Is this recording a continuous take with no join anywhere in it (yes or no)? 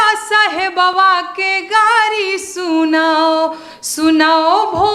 yes